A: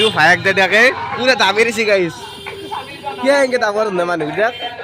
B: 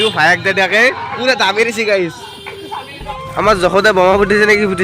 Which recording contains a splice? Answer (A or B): B